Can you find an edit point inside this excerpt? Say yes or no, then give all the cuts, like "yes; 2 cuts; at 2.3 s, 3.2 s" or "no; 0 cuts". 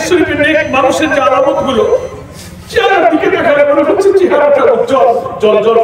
no; 0 cuts